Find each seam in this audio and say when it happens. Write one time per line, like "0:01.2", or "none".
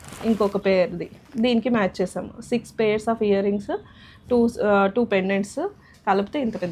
none